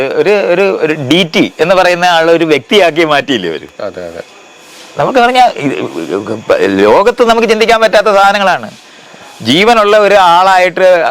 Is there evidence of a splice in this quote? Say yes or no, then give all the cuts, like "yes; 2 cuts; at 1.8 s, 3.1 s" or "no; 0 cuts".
no; 0 cuts